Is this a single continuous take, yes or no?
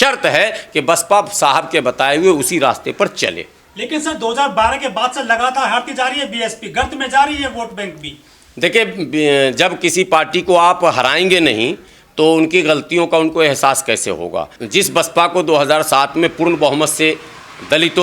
yes